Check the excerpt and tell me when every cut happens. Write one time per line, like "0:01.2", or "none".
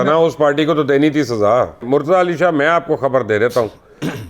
0:01.8